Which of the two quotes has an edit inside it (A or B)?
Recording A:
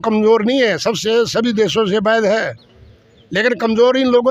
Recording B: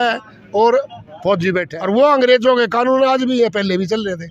B